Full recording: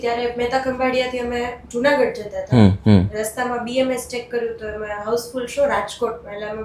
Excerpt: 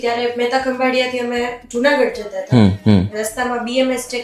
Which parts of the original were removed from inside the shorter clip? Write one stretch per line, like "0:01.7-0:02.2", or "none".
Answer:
none